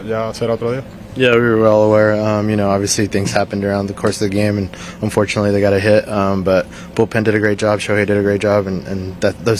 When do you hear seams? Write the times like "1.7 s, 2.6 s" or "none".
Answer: none